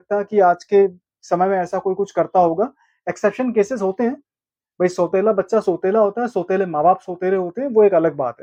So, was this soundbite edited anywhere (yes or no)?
no